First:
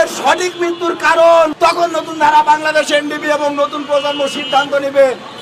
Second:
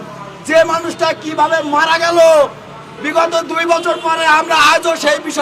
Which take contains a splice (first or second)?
first